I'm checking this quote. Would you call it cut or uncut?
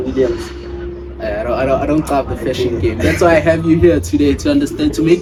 uncut